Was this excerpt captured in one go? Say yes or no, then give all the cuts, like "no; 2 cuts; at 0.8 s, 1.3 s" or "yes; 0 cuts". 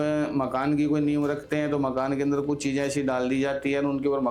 yes; 0 cuts